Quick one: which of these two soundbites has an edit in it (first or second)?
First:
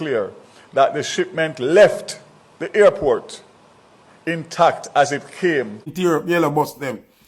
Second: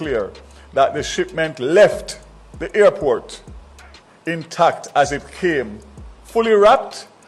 first